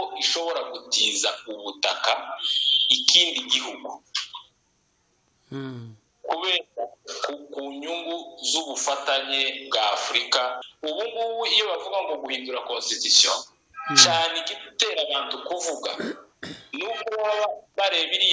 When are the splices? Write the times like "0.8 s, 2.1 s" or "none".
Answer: 10.7 s